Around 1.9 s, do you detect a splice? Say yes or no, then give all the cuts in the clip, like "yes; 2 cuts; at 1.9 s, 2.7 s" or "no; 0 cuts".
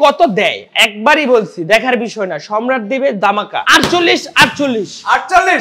no; 1 cut; at 3.6 s